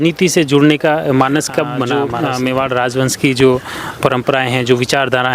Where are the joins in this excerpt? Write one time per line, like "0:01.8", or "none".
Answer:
0:01.9